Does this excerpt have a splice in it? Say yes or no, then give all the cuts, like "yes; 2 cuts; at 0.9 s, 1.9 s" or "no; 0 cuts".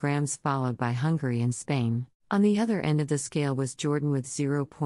no; 0 cuts